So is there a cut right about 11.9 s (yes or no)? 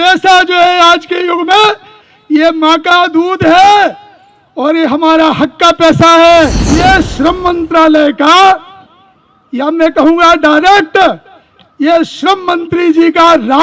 no